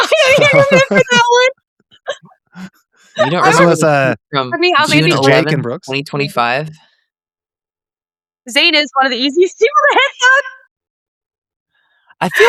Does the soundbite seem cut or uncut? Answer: uncut